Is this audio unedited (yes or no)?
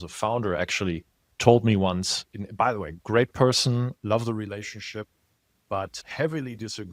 no